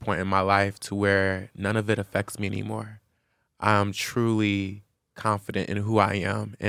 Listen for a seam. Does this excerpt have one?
no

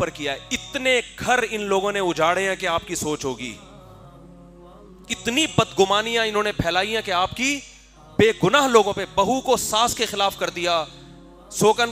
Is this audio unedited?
yes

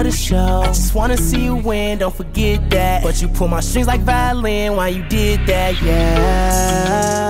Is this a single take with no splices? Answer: yes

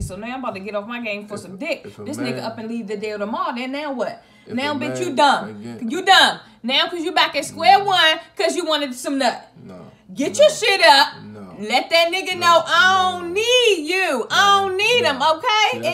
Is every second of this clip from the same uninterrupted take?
yes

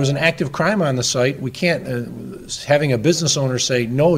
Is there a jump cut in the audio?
no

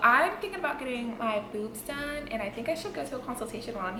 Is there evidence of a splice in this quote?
no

